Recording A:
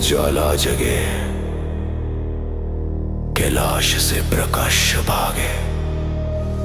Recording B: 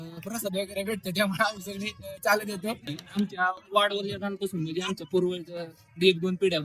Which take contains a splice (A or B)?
B